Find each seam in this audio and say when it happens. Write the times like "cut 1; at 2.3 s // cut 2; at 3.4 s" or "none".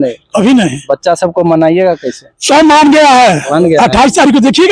none